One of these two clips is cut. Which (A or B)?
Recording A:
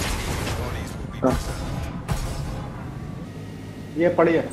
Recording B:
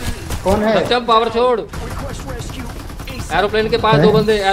A